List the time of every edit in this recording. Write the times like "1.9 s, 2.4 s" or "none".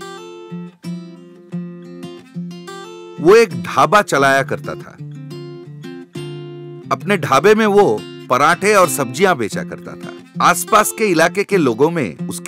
3.1 s

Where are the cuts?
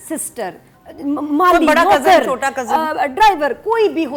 none

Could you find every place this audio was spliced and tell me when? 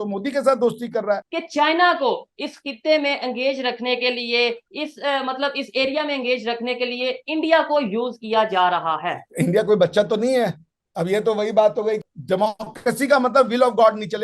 1.4 s, 12.0 s

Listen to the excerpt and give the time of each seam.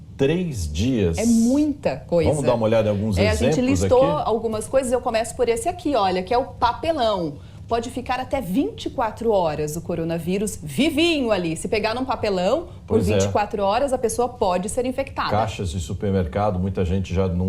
10.6 s, 16.5 s

